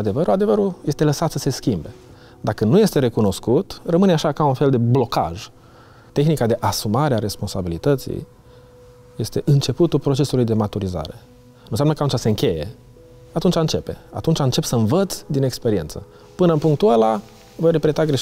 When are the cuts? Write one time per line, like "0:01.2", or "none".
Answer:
0:06.0